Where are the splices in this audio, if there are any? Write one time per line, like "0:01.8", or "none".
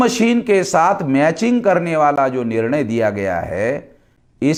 none